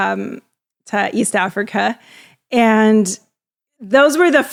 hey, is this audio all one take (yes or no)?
yes